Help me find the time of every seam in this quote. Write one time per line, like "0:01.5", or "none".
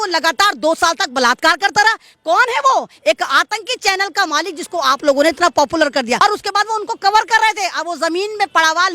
0:06.2

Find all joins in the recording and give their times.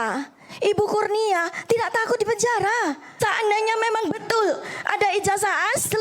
0:03.1

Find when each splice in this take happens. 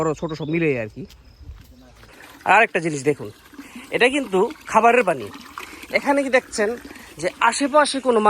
0:02.2

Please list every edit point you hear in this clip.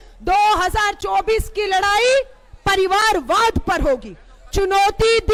none

